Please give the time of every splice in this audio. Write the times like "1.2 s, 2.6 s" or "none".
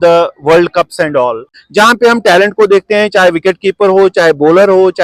1.5 s